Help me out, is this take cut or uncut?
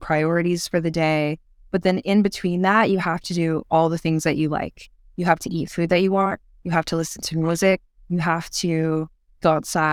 uncut